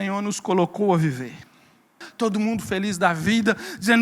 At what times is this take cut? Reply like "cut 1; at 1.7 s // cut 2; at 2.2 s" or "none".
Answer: cut 1; at 2.0 s